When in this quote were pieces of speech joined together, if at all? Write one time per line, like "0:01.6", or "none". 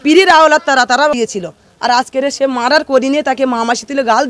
0:01.2